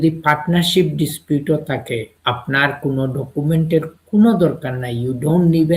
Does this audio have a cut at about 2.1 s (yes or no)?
yes